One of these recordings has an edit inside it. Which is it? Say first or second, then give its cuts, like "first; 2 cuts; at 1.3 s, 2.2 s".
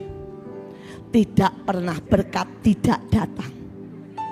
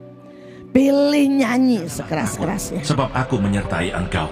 second; 1 cut; at 2.8 s